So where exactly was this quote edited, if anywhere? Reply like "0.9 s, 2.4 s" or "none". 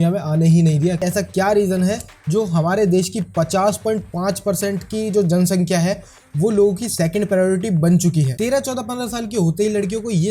1.0 s, 8.3 s